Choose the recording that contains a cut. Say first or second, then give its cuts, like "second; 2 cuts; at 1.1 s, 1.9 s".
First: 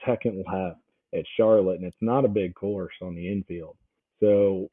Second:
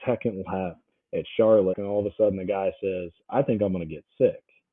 second; 1 cut; at 1.8 s